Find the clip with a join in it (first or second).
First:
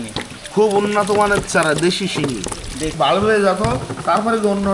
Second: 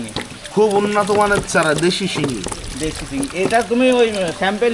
first